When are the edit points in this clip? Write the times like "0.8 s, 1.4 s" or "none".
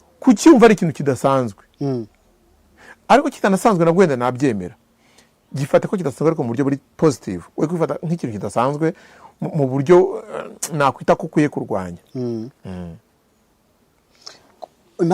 none

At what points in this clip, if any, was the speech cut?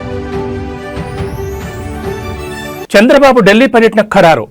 2.2 s

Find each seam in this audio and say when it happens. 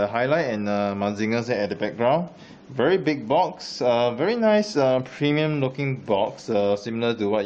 1.2 s

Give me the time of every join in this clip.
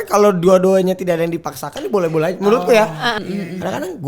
3.1 s

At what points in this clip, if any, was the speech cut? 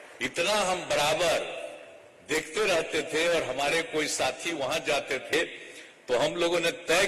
5.3 s

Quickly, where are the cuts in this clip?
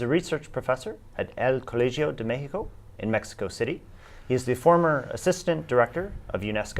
5.6 s

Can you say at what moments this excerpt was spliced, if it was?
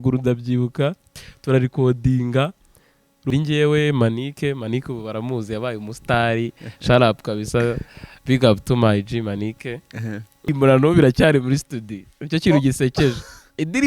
3.3 s, 10.5 s

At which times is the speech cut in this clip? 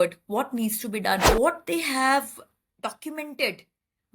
1.3 s

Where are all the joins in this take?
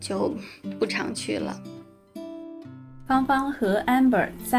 1.6 s, 3.0 s

